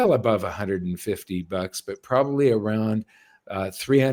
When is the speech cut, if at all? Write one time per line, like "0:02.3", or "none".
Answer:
none